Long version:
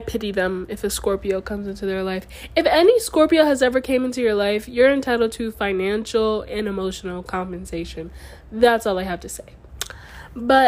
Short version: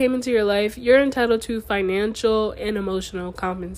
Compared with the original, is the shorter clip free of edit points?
yes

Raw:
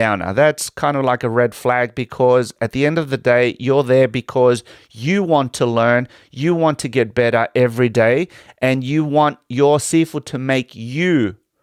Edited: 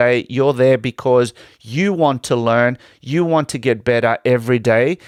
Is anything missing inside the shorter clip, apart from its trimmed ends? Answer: no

